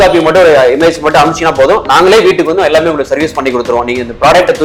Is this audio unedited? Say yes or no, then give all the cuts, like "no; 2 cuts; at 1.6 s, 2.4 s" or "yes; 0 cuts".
yes; 0 cuts